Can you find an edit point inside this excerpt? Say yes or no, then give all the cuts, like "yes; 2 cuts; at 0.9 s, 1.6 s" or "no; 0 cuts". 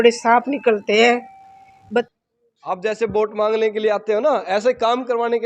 yes; 1 cut; at 2.1 s